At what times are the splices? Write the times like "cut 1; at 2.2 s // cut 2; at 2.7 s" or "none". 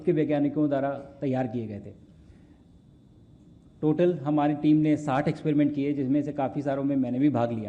none